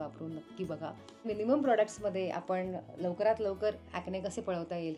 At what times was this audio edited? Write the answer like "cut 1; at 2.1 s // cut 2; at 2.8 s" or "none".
cut 1; at 1.3 s